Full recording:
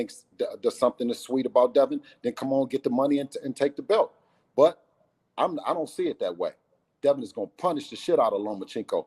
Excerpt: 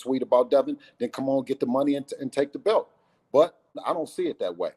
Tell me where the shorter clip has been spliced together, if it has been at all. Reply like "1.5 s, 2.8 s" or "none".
3.8 s

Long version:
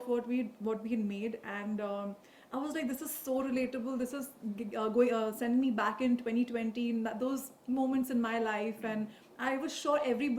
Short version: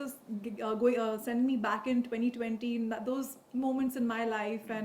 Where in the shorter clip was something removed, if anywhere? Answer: none

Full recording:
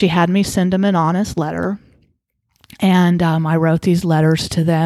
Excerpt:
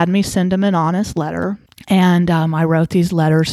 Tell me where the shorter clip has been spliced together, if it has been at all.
1.7 s

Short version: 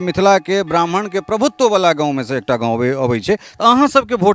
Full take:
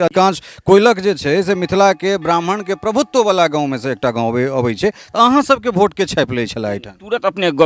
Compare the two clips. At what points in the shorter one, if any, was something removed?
none

